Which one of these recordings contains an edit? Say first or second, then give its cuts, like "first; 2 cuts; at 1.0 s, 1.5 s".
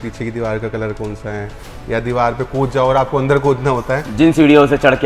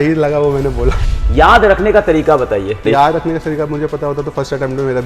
second; 2 cuts; at 1.0 s, 2.8 s